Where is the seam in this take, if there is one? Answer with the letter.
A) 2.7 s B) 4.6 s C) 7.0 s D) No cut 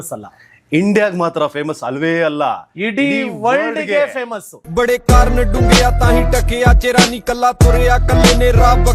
D